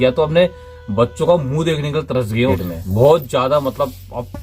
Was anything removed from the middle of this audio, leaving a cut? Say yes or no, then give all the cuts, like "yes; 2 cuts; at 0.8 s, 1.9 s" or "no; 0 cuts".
yes; 1 cut; at 2.5 s